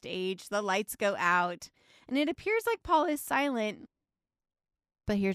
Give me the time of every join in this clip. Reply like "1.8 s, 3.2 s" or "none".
3.9 s